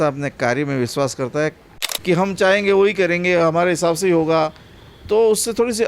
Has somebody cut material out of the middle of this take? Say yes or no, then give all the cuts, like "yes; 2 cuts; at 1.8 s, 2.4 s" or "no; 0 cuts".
yes; 1 cut; at 1.9 s